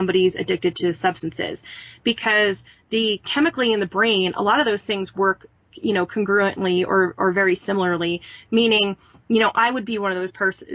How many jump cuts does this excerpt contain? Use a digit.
0